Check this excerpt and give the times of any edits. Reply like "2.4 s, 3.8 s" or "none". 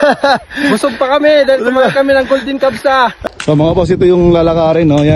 3.2 s